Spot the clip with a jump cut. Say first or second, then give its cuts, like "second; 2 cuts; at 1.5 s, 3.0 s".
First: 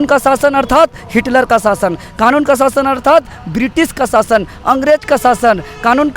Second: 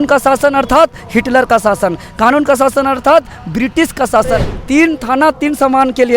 second; 1 cut; at 4.5 s